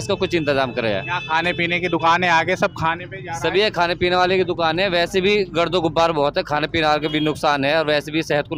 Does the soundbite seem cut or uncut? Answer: uncut